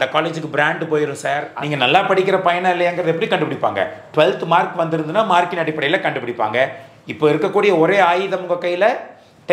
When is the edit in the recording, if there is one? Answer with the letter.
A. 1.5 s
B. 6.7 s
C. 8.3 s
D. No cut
A